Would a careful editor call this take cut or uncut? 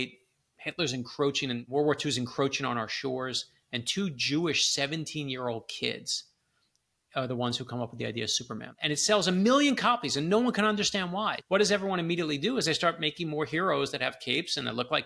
cut